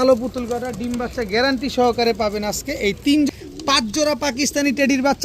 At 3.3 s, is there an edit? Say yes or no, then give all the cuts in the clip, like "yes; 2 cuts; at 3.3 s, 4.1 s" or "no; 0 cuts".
yes; 1 cut; at 3.3 s